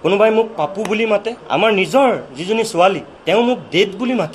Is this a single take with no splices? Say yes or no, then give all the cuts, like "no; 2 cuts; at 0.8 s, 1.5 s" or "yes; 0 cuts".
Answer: no; 2 cuts; at 1.4 s, 3.1 s